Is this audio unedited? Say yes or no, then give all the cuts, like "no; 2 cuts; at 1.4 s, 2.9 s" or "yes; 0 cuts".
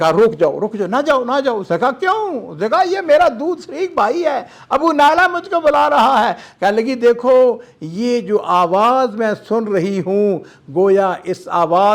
yes; 0 cuts